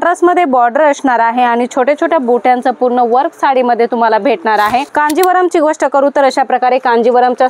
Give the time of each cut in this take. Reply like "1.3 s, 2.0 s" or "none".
4.9 s